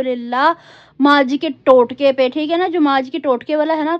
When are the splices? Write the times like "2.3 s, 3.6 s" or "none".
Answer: none